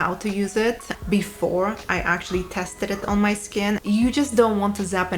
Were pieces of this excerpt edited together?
yes; 1 cut; at 3.8 s

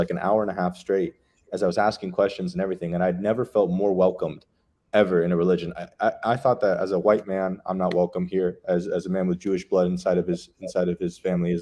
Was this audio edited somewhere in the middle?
no; 0 cuts

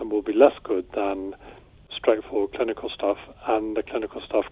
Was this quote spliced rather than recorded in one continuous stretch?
yes; 1 cut; at 1.9 s

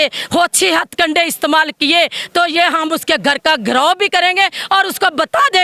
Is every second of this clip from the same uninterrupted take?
yes; 0 cuts

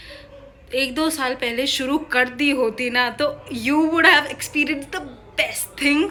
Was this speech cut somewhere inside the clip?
no; 0 cuts

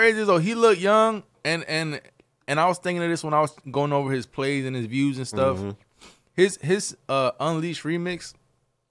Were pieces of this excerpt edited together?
no; 0 cuts

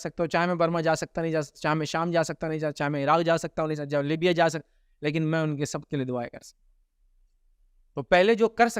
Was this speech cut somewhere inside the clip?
no; 0 cuts

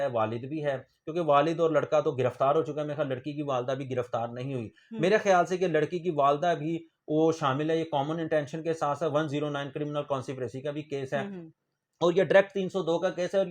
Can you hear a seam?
no; 0 cuts

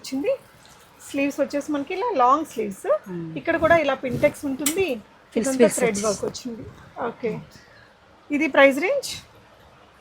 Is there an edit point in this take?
no; 0 cuts

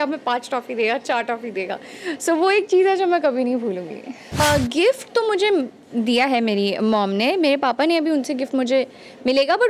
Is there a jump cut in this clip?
yes; 1 cut; at 4.4 s

